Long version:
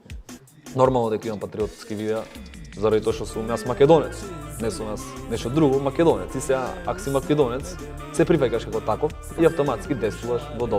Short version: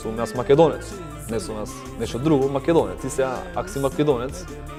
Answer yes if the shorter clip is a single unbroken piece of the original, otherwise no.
yes